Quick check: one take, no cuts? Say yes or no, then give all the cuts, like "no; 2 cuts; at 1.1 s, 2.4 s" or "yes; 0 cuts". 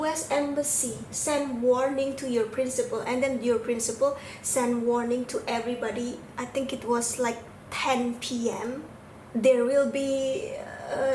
no; 1 cut; at 8.9 s